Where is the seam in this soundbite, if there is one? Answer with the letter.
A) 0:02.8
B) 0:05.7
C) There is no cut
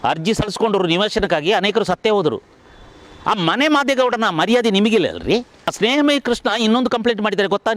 B